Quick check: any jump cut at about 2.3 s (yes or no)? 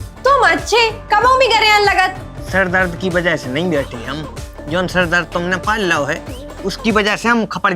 yes